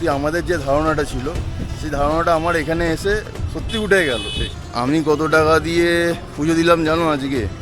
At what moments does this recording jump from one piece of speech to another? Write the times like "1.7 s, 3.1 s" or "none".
4.6 s